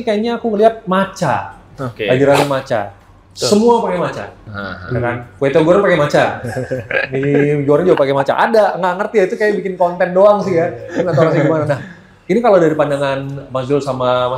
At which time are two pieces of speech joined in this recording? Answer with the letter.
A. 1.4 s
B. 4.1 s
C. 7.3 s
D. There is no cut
D